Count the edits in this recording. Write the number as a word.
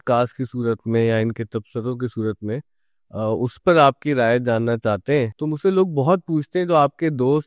one